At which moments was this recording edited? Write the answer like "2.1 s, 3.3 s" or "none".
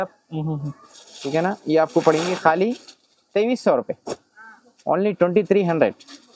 none